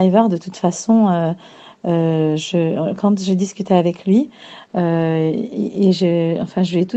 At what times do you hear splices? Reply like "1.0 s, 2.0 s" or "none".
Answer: 6.0 s